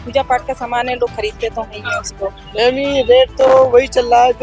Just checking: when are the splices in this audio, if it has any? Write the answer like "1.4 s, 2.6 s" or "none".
2.4 s

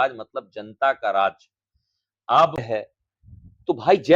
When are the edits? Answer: 2.7 s

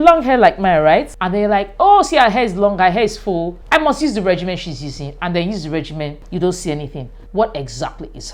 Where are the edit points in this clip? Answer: 1.2 s, 3.6 s, 6.2 s

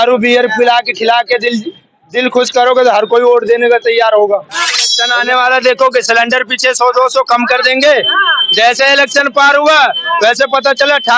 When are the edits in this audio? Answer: 5.0 s

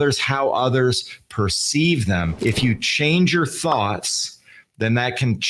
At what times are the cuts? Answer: 2.3 s

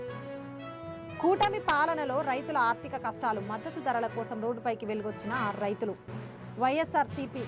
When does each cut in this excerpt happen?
1.1 s

